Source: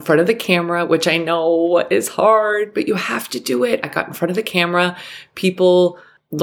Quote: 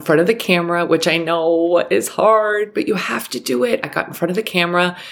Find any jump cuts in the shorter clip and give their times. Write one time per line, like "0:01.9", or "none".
none